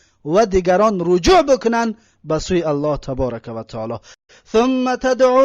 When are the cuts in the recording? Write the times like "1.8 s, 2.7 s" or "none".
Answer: 4.2 s